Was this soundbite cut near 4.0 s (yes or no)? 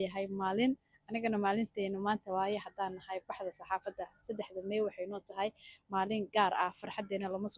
no